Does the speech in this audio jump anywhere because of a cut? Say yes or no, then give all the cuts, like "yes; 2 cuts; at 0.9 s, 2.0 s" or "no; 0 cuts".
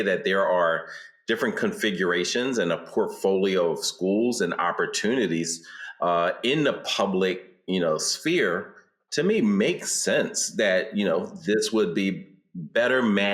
no; 0 cuts